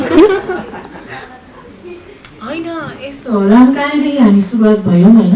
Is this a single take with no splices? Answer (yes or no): yes